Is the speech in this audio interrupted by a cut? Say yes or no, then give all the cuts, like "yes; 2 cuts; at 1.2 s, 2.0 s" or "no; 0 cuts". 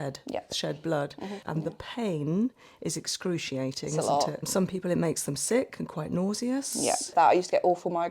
yes; 3 cuts; at 1.4 s, 4.4 s, 7.1 s